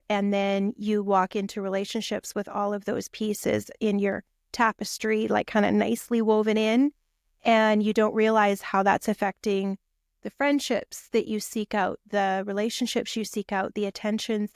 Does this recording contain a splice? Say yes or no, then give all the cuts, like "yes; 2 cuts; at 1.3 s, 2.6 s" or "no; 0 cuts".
no; 0 cuts